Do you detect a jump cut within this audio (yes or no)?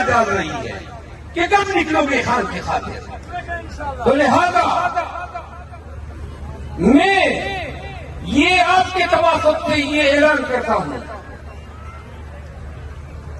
no